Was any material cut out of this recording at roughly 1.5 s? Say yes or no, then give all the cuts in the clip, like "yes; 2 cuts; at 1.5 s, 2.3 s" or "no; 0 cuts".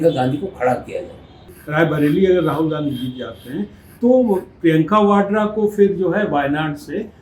yes; 1 cut; at 1.5 s